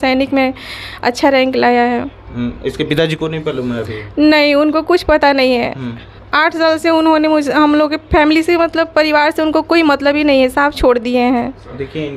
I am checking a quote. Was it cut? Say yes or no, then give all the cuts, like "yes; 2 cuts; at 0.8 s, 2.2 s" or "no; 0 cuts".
no; 0 cuts